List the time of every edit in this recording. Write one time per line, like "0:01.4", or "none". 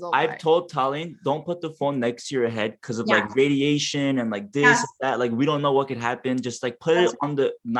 none